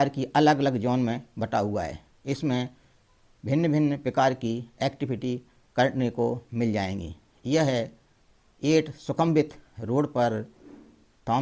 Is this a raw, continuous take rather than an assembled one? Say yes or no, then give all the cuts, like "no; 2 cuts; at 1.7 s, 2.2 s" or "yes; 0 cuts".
yes; 0 cuts